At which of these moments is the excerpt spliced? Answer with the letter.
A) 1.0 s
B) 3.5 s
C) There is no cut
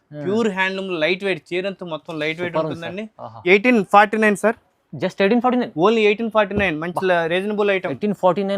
B